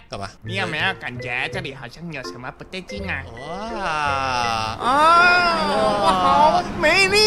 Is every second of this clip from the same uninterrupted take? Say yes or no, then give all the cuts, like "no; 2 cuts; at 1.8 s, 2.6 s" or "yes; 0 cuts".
yes; 0 cuts